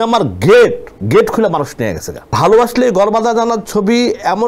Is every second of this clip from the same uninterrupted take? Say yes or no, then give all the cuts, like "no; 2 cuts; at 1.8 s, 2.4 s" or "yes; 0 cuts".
no; 2 cuts; at 0.9 s, 2.3 s